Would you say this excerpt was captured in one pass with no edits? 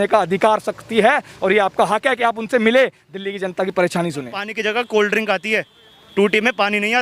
no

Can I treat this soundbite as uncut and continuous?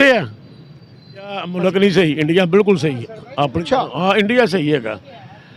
no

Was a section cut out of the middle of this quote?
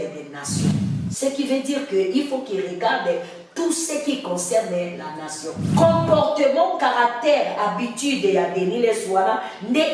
yes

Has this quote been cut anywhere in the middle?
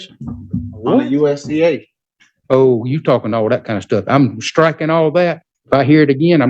yes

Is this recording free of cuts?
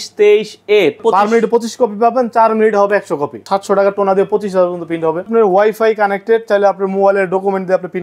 no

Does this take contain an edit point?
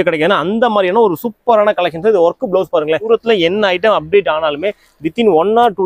yes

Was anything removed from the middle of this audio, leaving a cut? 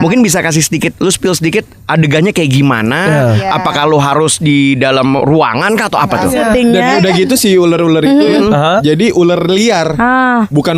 yes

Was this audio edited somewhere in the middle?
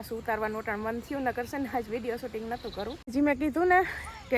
yes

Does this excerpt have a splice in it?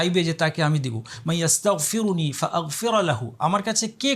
no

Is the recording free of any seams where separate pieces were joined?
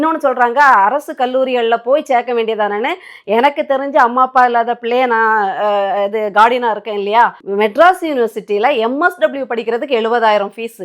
no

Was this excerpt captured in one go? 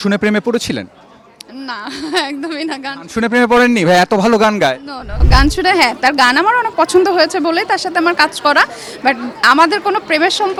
yes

